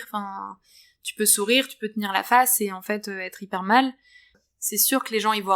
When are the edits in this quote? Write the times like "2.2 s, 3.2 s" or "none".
4.4 s